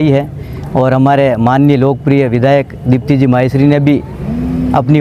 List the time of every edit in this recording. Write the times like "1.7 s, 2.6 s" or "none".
none

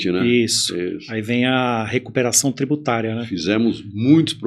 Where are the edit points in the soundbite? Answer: none

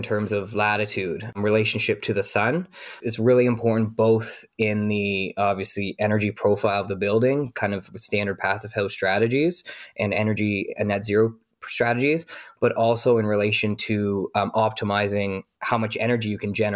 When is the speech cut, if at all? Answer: none

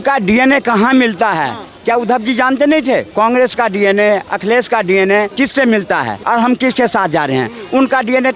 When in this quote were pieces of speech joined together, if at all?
3.1 s, 4.3 s, 5.3 s, 6.2 s

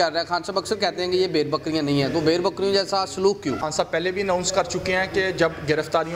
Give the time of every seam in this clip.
3.7 s

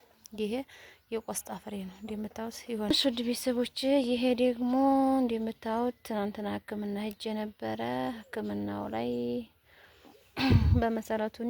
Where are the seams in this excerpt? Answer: 2.9 s

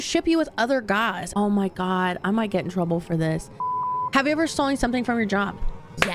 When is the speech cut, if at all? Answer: 1.2 s, 3.6 s

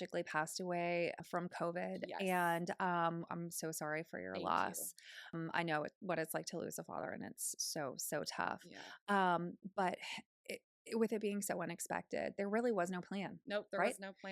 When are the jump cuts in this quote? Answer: 1.2 s, 5.4 s

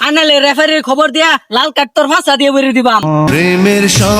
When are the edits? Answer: 3.3 s

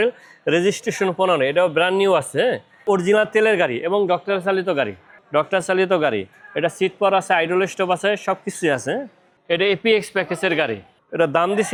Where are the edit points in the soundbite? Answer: none

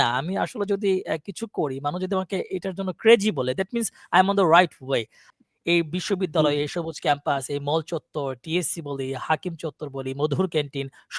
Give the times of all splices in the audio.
5.2 s

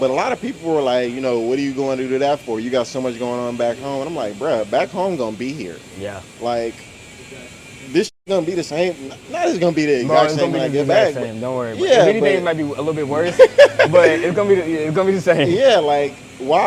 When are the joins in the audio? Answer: none

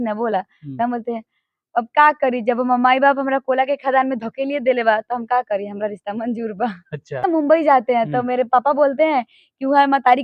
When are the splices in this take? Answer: 7.2 s

